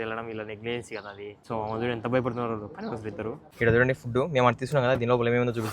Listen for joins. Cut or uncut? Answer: cut